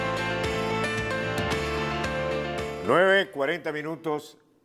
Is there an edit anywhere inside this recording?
yes; 1 cut; at 1.7 s

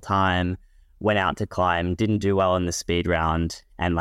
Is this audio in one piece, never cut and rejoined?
yes; 0 cuts

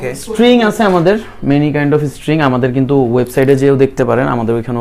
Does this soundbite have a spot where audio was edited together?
no; 0 cuts

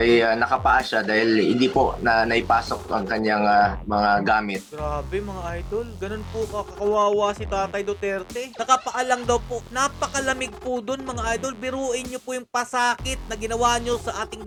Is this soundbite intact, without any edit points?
yes; 0 cuts

